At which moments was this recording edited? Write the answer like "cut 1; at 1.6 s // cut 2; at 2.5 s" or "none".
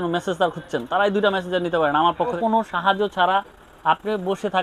cut 1; at 2.4 s